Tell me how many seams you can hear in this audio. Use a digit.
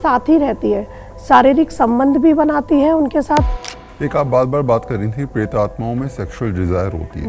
1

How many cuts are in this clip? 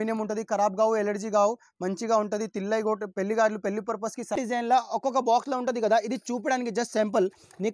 1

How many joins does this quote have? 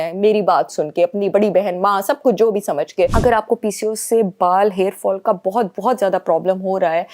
1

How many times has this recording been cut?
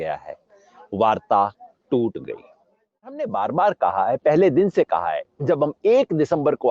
1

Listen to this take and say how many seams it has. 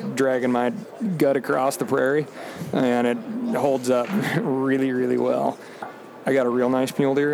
0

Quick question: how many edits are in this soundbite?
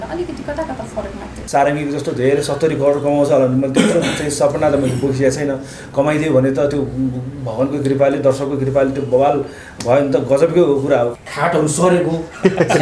2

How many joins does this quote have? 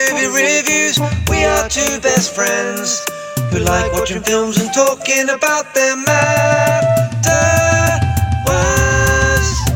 0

